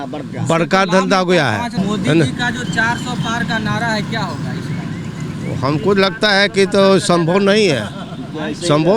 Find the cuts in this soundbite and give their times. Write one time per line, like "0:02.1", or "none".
0:01.7